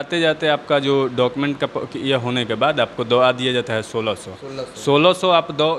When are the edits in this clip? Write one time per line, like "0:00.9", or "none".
none